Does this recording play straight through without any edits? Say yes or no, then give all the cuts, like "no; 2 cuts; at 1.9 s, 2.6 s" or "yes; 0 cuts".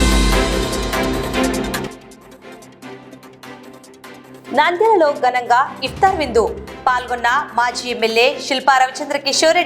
no; 1 cut; at 1.5 s